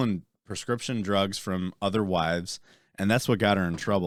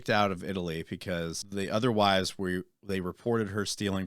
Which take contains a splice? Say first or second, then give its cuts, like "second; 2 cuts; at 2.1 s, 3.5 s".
second; 1 cut; at 1.4 s